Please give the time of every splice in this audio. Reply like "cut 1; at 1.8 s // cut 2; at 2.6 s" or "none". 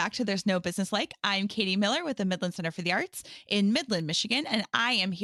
none